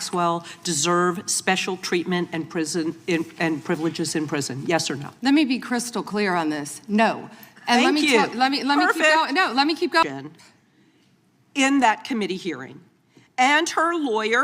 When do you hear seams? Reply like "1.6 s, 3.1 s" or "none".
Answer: 10.0 s